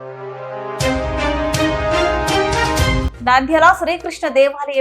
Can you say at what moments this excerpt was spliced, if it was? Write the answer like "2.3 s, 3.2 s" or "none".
3.0 s